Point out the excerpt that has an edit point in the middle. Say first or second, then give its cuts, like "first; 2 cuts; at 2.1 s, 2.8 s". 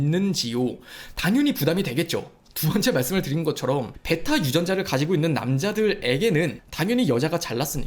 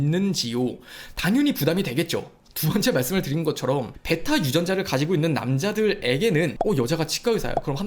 second; 1 cut; at 6.6 s